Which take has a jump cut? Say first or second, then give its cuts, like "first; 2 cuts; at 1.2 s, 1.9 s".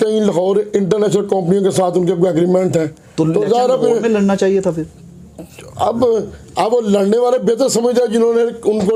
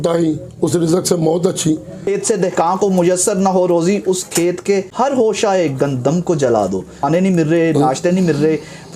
second; 3 cuts; at 2.0 s, 4.9 s, 7.0 s